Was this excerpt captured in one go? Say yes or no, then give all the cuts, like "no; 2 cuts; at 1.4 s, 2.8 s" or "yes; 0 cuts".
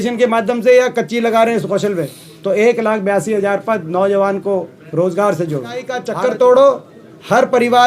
no; 1 cut; at 6.0 s